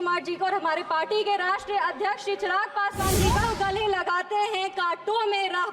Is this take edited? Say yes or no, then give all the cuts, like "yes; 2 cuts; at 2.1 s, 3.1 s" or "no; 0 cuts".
yes; 1 cut; at 3.4 s